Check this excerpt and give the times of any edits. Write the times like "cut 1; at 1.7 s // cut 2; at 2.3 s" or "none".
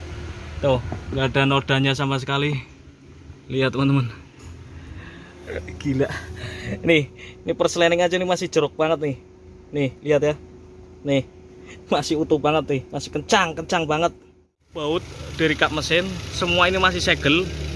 cut 1; at 14.7 s